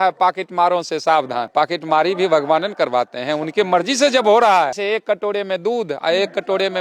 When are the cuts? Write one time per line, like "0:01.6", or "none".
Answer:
0:01.5
0:04.8